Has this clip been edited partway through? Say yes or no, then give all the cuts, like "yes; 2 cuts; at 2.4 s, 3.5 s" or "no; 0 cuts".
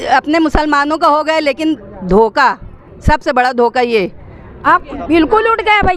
yes; 1 cut; at 4.7 s